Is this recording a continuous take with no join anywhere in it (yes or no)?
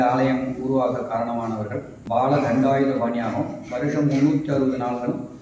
no